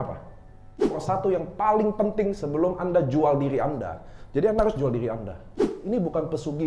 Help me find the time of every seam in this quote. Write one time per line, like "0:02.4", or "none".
0:01.0
0:05.7